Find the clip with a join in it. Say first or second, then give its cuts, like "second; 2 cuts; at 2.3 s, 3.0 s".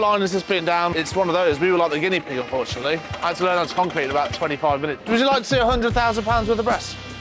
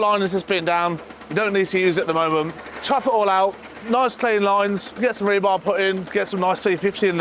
first; 3 cuts; at 1.0 s, 3.1 s, 5.0 s